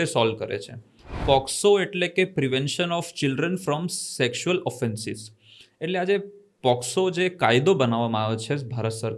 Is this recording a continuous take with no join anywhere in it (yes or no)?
no